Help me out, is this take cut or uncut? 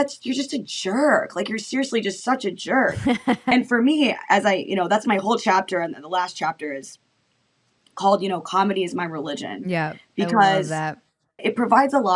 cut